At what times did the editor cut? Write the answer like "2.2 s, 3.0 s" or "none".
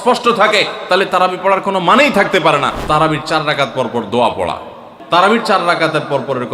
2.8 s, 4.7 s